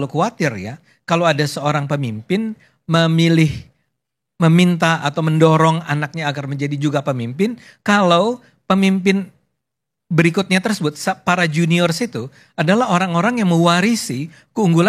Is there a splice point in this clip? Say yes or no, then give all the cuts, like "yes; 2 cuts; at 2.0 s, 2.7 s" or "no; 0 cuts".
no; 0 cuts